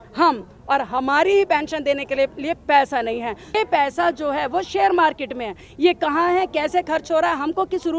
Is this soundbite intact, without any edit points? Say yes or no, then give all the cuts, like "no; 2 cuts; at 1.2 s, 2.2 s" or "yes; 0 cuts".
no; 1 cut; at 3.6 s